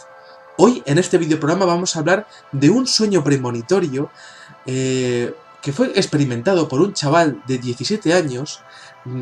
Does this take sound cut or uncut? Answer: cut